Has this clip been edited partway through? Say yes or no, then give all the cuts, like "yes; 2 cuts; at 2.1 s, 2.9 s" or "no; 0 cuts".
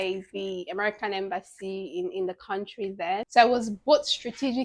yes; 1 cut; at 3.2 s